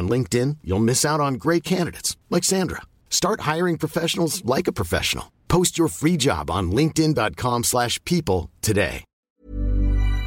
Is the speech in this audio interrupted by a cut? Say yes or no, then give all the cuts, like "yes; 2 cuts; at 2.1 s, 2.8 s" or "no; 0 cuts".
yes; 1 cut; at 9.2 s